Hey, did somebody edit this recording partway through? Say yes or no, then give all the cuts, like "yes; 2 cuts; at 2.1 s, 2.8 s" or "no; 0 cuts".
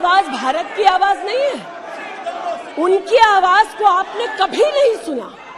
no; 0 cuts